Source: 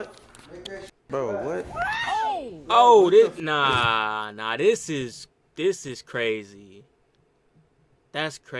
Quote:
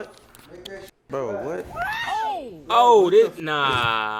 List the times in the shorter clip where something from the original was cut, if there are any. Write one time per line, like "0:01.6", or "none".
none

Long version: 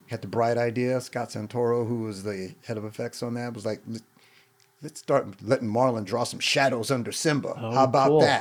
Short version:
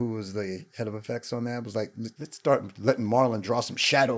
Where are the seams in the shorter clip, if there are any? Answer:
0:02.2

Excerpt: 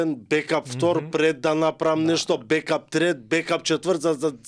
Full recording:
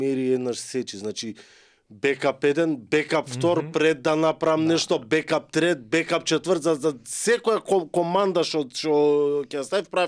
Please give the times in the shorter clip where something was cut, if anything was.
none

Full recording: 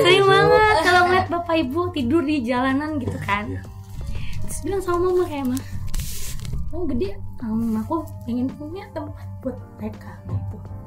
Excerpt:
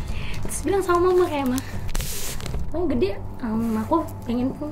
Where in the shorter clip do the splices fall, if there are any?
none

